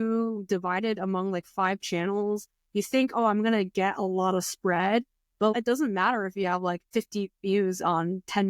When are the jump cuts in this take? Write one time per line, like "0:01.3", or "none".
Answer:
0:05.5
0:06.9